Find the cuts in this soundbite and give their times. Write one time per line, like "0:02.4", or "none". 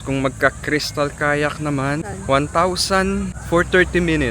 0:02.0
0:03.4

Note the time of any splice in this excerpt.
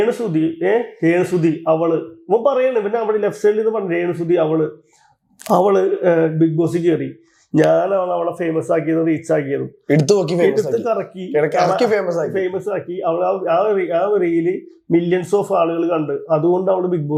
none

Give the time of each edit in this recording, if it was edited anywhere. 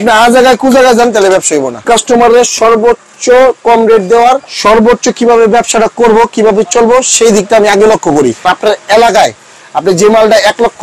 0:01.9
0:04.5
0:08.4

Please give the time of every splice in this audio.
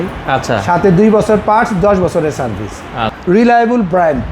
0:03.1

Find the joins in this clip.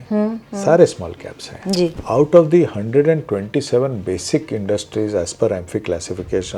0:01.9

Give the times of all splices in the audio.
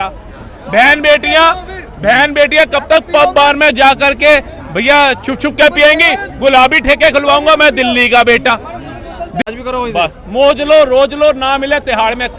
0:09.4

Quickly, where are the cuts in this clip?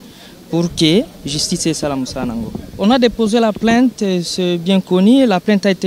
0:02.6

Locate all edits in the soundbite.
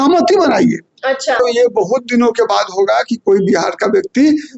0:01.4

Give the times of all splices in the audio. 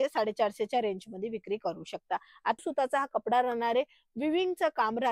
0:02.6

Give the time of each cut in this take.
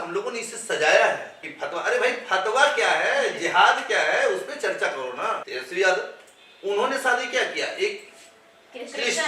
0:01.5
0:05.5

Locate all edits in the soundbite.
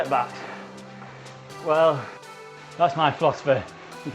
0:02.2

